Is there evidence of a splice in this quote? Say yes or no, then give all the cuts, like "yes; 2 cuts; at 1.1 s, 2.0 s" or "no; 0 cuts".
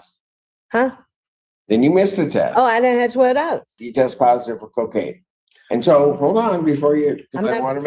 yes; 1 cut; at 3.8 s